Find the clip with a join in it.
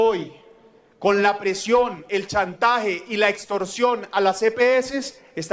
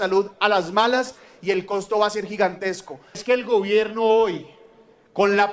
second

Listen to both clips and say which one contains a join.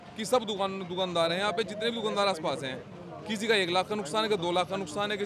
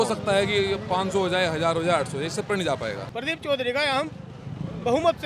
second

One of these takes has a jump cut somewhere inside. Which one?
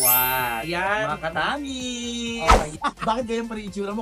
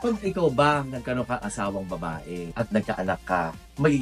first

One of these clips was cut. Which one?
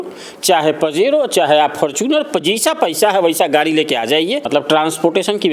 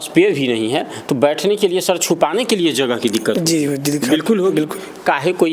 first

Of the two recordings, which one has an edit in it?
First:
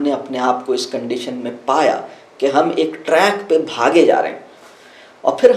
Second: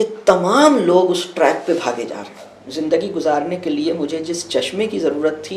second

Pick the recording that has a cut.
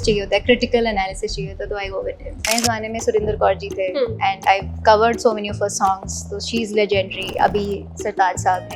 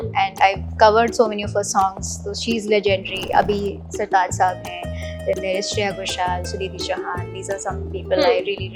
first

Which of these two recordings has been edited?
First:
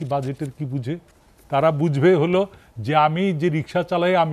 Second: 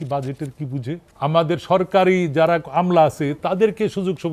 second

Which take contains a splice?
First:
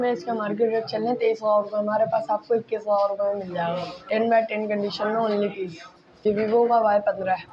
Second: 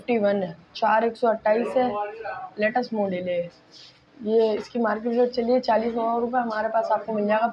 first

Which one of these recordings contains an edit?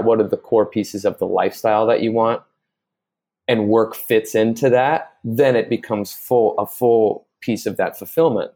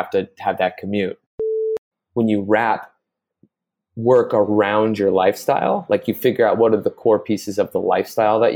second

